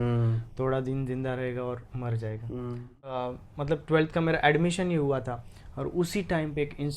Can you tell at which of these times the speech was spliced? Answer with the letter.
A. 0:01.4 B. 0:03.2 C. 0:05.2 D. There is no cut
B